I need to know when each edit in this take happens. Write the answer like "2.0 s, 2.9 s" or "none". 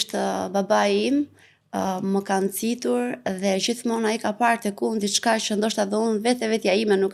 none